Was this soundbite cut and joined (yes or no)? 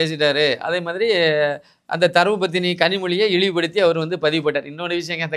no